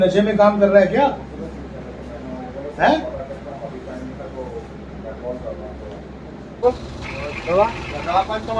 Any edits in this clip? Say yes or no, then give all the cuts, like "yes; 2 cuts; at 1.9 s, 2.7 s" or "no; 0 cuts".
yes; 1 cut; at 6.6 s